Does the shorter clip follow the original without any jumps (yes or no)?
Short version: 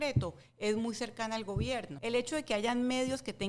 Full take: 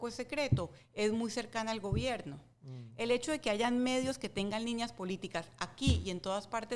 no